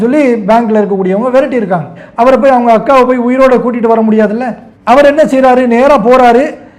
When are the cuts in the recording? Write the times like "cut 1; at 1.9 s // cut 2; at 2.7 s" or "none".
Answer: cut 1; at 2.0 s